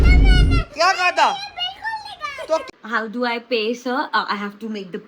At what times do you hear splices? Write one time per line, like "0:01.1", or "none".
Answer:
0:02.7